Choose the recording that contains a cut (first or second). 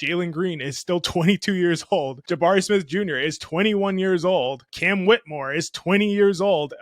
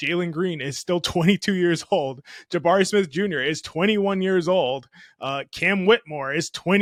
first